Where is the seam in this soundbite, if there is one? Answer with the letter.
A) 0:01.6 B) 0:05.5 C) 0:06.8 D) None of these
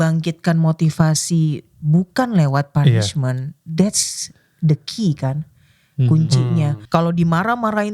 C